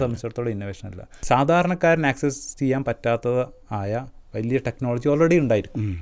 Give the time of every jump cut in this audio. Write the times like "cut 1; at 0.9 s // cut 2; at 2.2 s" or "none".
cut 1; at 1.1 s